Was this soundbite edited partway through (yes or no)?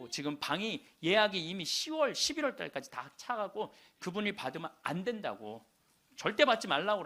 no